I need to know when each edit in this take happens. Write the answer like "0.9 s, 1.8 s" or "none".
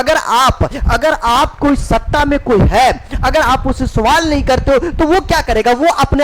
none